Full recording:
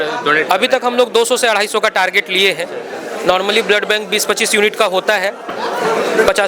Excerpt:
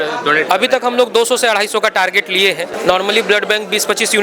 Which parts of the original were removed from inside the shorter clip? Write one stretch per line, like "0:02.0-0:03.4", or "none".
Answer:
0:02.7-0:03.1